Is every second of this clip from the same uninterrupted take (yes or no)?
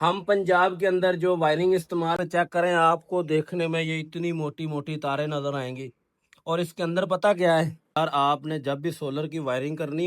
no